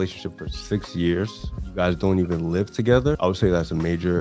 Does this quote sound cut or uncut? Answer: cut